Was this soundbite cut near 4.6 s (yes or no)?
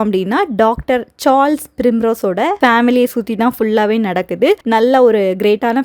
yes